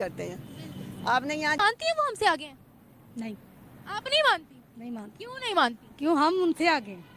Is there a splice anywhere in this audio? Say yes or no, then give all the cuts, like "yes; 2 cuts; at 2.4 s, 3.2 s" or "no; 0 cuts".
yes; 1 cut; at 1.6 s